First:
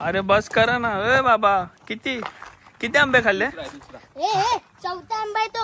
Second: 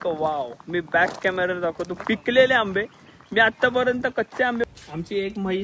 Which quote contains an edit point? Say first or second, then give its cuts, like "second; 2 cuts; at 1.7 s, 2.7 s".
second; 1 cut; at 4.6 s